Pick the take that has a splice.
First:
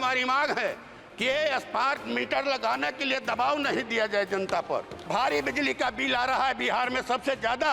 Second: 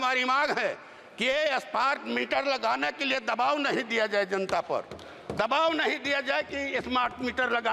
first; 1 cut; at 5.1 s

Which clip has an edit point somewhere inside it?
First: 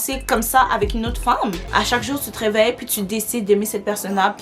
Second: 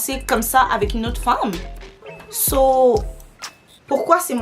first; 1 cut; at 1.6 s

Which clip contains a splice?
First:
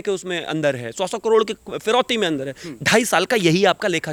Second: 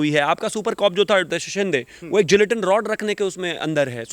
second; 1 cut; at 1.3 s

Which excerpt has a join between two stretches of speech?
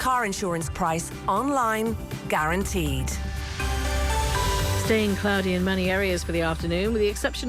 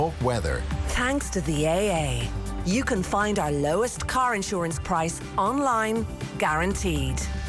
first; 1 cut; at 4.8 s

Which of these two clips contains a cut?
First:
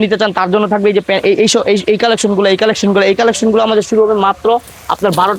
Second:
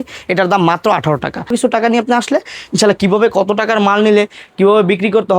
second; 1 cut; at 1.5 s

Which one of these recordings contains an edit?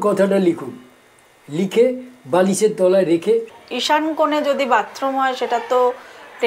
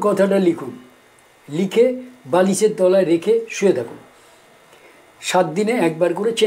first; 1 cut; at 3.5 s

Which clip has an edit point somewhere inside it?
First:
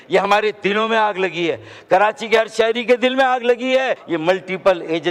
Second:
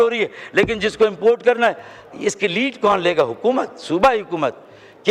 first; 1 cut; at 4.0 s

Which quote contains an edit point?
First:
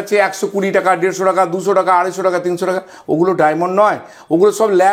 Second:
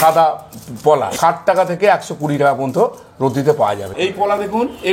second; 2 cuts; at 1.1 s, 3.9 s

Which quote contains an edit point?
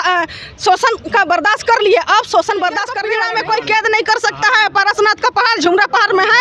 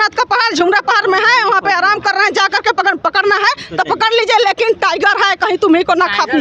first; 1 cut; at 3.0 s

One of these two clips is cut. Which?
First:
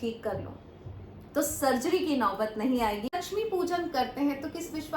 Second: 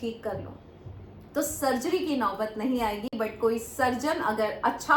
first; 1 cut; at 3.1 s

